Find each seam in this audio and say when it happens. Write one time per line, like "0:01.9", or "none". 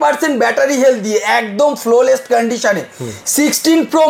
none

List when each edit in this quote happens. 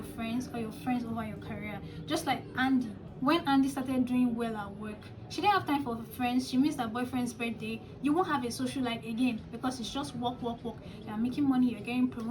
none

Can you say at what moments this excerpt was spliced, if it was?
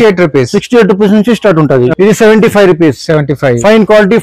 0:01.9

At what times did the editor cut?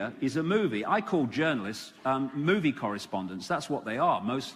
0:01.1

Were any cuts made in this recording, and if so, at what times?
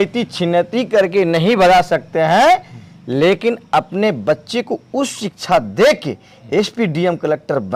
none

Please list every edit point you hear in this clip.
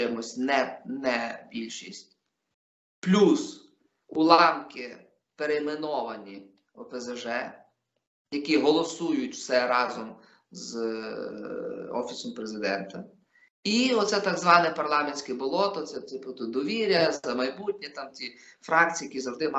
none

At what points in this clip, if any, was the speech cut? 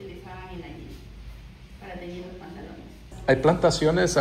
0:03.0

